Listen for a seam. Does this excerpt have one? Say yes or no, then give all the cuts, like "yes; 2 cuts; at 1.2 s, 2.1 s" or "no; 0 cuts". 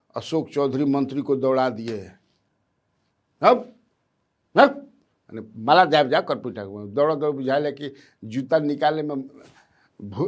no; 0 cuts